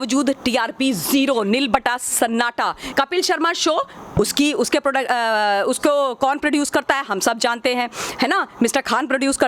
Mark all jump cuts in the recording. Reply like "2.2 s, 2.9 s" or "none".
2.8 s